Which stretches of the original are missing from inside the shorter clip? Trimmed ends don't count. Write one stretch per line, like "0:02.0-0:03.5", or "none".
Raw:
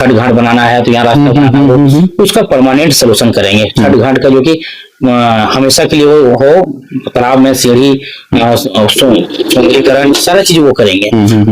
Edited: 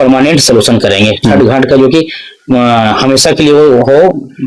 none

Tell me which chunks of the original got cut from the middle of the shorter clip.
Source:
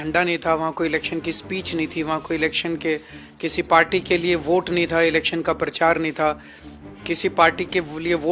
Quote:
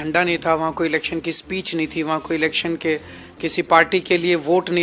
none

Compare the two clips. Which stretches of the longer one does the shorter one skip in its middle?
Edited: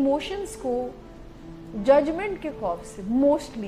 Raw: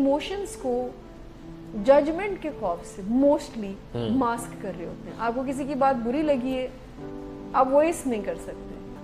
none

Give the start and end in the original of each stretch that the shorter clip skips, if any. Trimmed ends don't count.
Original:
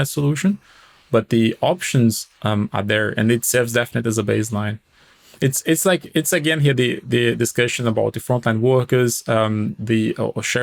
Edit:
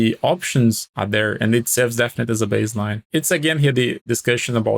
0:02.3-0:02.7
0:04.8-0:06.1
0:07.1-0:07.4

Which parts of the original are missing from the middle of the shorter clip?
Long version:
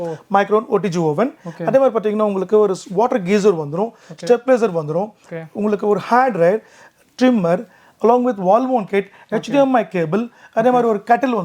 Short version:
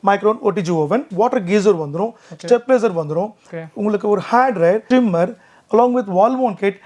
0:01.4-0:02.9
0:06.6-0:07.1

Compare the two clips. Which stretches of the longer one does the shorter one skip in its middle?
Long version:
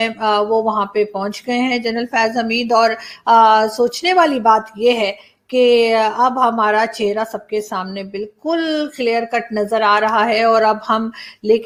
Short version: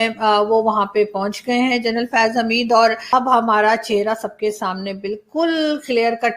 0:03.1-0:06.2

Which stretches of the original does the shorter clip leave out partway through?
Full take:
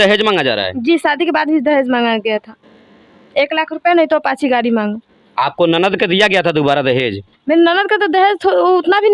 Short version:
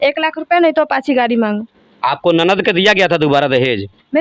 none

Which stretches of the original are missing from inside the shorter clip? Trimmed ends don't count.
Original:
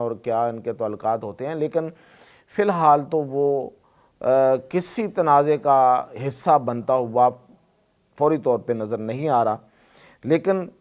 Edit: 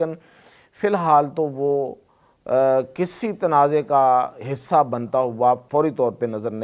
0:07.4-0:08.1

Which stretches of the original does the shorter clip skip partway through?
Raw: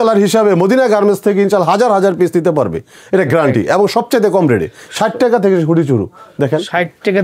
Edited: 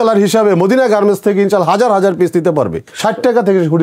0:02.9-0:04.8

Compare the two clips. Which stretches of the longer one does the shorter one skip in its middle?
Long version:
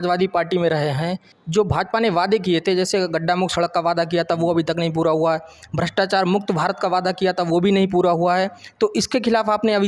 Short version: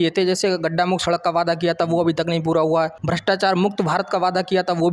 0:05.5-0:05.7

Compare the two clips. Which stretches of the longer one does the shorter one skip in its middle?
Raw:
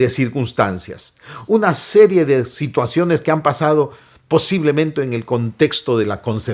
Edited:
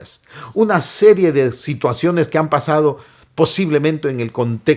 none

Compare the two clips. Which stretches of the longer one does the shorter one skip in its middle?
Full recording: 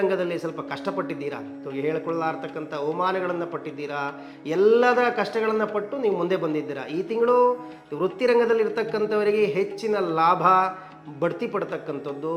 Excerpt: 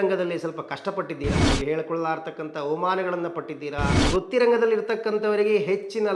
0:01.4-0:01.6
0:04.1-0:07.8

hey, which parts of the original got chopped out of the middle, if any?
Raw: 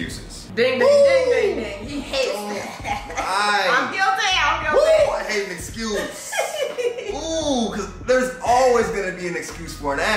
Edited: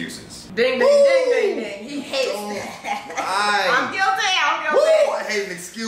none

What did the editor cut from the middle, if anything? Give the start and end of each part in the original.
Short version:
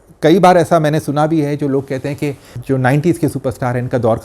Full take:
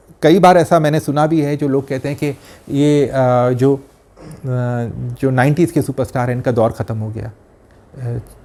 0:02.5-0:05.0

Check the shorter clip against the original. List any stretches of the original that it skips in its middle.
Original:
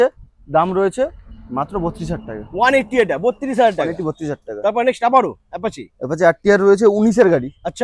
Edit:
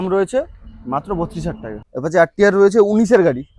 0:02.4-0:05.8

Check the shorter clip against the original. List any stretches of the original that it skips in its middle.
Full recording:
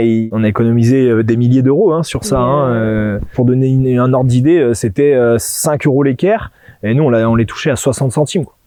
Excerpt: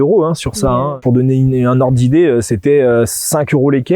0:02.6-0:03.2

